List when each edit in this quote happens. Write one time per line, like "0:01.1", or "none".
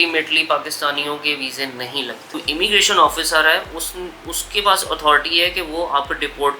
0:02.4